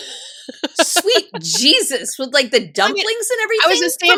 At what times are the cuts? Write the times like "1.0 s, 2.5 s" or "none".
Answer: none

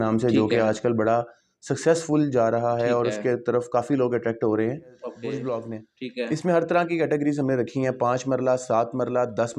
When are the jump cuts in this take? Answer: 5.2 s

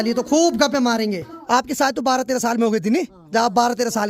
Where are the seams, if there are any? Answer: 1.3 s

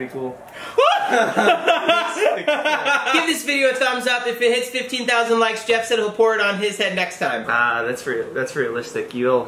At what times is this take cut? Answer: 3.1 s, 7.5 s

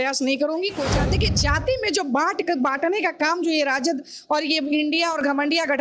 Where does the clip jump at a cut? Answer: 1.0 s

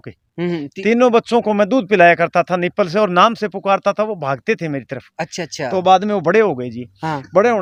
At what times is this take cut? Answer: none

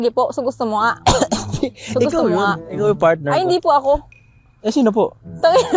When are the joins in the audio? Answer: none

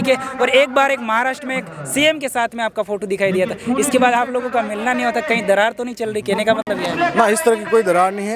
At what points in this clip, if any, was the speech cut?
none

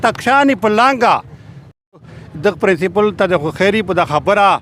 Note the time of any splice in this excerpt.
2.0 s

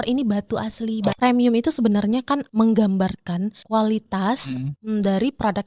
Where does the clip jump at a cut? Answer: 1.2 s, 2.5 s, 3.6 s, 4.7 s

